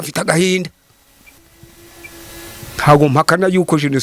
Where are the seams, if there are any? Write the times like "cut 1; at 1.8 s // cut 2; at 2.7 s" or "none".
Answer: cut 1; at 1.3 s